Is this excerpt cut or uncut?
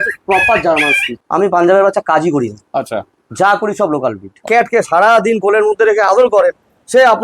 cut